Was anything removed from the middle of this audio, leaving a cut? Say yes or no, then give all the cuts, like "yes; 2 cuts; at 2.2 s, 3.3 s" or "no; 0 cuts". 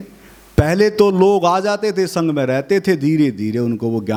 no; 0 cuts